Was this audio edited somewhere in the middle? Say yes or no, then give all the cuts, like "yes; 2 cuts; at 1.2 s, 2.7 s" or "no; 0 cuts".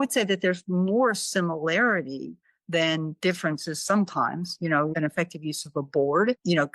yes; 1 cut; at 4.9 s